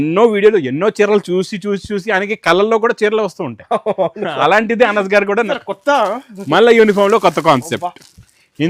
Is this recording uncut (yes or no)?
no